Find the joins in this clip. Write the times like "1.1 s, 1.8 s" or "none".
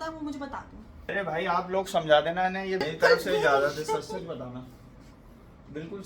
1.0 s, 2.8 s